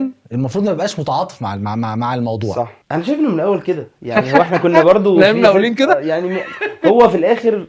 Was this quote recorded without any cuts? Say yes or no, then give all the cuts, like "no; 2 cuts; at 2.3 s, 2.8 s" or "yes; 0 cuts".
no; 1 cut; at 2.8 s